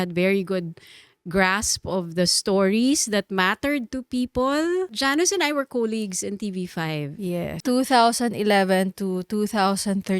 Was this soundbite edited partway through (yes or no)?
yes